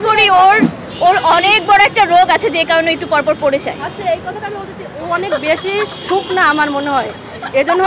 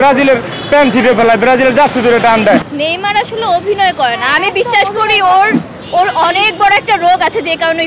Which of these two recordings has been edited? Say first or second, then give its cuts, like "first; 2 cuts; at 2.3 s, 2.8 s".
second; 1 cut; at 2.7 s